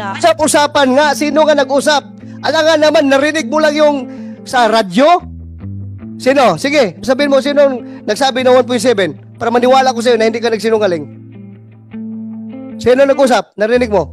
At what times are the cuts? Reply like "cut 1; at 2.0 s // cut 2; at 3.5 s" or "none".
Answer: none

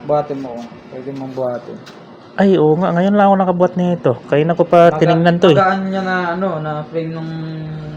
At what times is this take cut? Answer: none

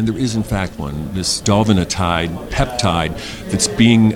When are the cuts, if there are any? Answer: cut 1; at 1.3 s

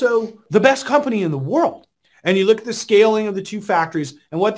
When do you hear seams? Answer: cut 1; at 1.9 s

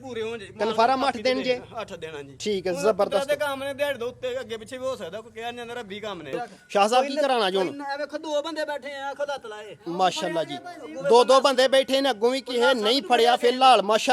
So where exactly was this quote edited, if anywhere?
cut 1; at 6.3 s

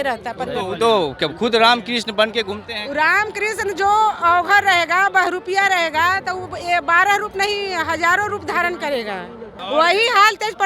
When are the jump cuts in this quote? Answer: cut 1; at 9.5 s

